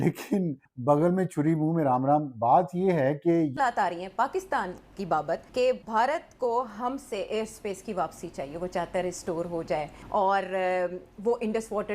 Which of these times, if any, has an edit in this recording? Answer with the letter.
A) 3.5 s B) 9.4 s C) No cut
A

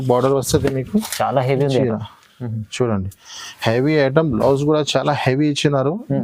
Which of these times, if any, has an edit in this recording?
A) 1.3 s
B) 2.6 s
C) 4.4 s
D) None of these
D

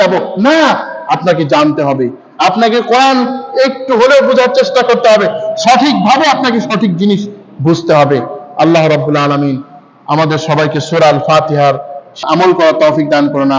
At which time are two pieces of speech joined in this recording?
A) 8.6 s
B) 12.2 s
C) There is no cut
B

